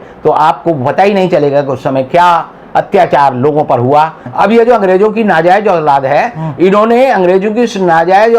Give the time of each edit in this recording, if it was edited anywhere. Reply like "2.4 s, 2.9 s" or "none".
4.2 s